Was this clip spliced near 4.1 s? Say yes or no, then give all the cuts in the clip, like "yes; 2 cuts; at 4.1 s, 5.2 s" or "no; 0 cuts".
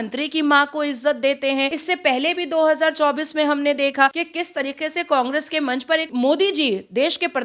yes; 3 cuts; at 1.8 s, 4.1 s, 6.1 s